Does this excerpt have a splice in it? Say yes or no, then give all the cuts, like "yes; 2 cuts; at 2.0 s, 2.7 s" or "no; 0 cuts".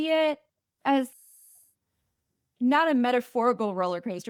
no; 0 cuts